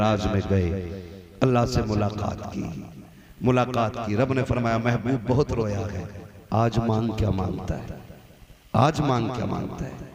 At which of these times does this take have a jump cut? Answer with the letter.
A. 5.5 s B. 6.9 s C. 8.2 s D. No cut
D